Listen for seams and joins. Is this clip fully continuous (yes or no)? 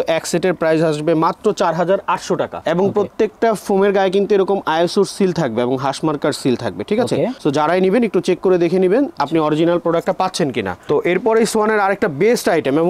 yes